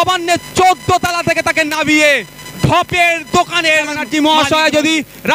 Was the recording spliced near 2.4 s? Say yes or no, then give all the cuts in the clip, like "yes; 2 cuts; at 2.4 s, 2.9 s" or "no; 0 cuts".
no; 1 cut; at 4.0 s